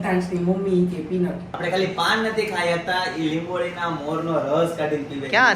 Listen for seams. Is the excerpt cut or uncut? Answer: cut